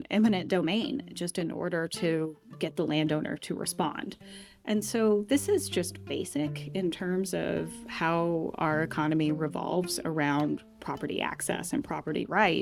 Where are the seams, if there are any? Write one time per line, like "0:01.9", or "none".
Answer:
none